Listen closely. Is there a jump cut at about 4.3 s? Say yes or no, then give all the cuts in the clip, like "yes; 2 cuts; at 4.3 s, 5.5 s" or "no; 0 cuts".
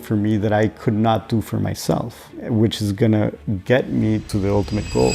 yes; 3 cuts; at 2.4 s, 3.5 s, 4.3 s